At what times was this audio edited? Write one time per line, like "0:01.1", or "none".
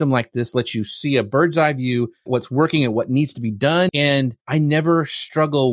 0:02.3
0:03.9